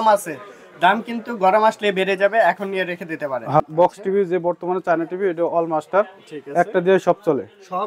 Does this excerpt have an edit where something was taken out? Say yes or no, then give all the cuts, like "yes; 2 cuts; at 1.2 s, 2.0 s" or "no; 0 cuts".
yes; 1 cut; at 3.6 s